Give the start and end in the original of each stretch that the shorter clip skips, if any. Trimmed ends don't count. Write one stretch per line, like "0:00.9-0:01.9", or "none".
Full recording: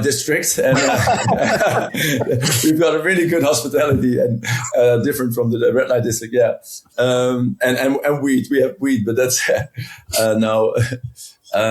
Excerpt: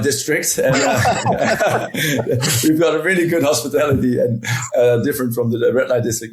none